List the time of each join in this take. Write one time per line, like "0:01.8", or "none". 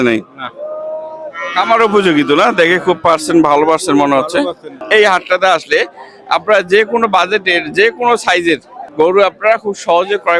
0:04.8
0:08.8

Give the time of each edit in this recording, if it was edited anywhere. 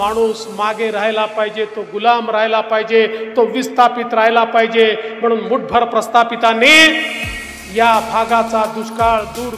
none

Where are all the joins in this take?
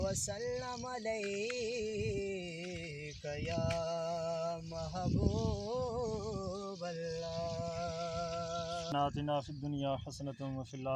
0:08.9

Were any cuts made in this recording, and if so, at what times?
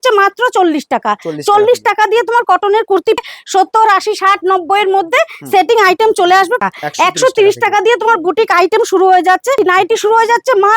0:03.2
0:06.6
0:09.6

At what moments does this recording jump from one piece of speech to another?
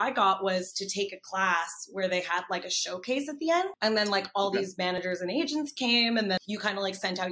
0:03.7
0:06.4

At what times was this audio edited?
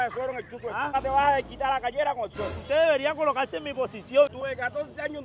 0:00.9
0:02.5
0:04.3

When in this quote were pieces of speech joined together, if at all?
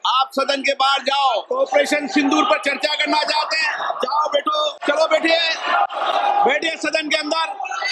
0:01.5
0:04.8

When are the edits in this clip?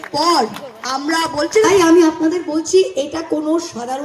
0:01.7

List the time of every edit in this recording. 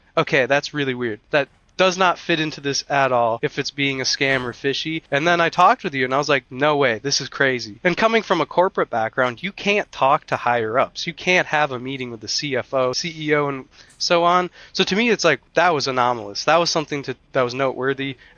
0:01.2
0:03.4
0:05.0
0:07.7
0:13.1
0:15.4

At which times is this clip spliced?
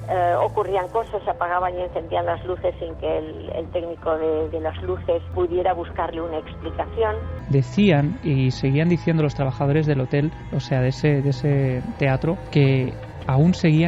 0:07.4

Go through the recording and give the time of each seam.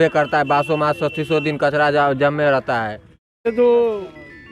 0:03.5

